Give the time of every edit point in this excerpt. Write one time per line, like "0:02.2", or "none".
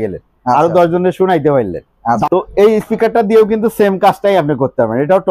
0:02.2